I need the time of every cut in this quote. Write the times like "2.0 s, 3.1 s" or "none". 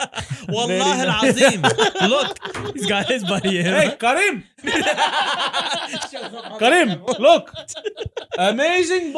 none